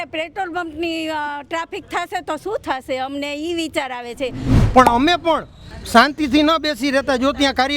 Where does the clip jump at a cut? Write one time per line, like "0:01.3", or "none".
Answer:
0:04.7